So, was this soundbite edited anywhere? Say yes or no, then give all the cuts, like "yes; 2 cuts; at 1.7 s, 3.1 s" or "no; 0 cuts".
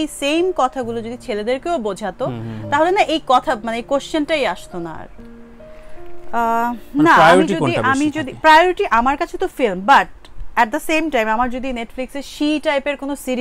no; 0 cuts